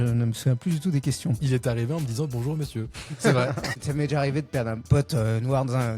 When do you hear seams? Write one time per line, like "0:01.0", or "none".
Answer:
0:01.4
0:03.8
0:04.9